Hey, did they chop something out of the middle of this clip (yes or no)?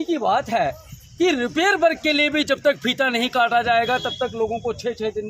no